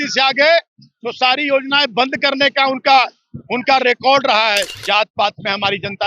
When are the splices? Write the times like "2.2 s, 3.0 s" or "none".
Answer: 4.7 s